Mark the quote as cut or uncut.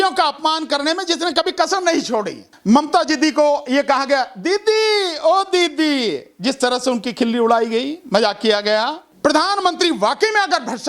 cut